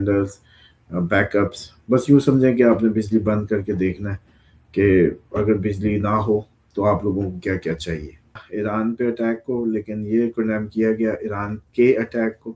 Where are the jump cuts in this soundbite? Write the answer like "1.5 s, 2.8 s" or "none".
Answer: 8.4 s